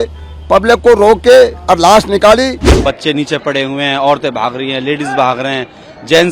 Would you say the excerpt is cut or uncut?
cut